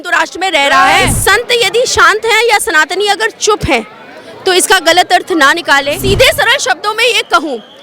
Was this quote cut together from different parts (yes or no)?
yes